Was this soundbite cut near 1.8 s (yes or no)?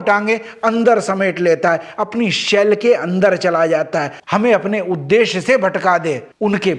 no